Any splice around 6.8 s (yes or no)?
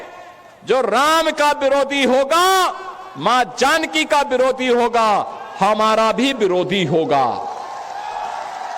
no